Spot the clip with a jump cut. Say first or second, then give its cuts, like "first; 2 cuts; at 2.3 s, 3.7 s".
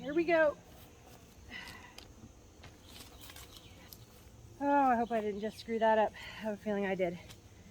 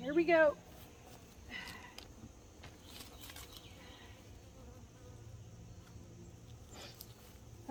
first; 1 cut; at 3.9 s